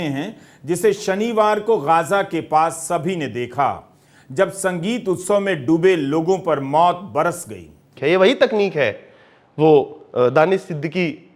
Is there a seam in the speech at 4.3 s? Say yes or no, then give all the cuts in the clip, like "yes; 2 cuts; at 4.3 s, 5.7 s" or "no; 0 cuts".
no; 1 cut; at 7.9 s